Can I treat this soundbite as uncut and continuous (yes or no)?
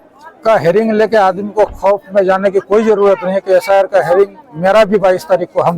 yes